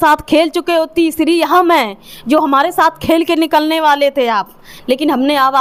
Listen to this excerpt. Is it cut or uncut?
uncut